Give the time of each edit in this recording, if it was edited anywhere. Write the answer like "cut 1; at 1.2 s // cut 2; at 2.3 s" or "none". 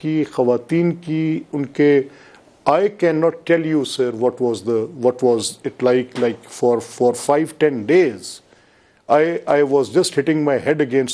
none